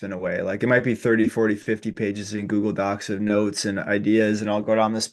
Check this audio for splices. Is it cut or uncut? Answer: uncut